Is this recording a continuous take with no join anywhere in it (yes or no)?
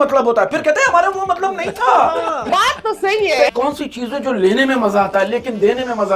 no